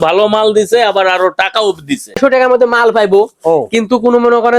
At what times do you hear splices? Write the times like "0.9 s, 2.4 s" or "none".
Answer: 2.2 s